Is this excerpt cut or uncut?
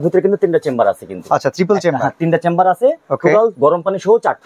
cut